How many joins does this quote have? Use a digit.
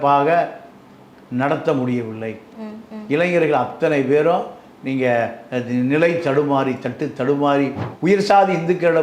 1